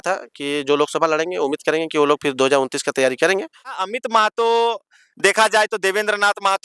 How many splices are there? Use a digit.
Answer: 1